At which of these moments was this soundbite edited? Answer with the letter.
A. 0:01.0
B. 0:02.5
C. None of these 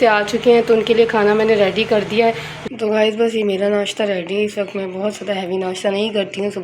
B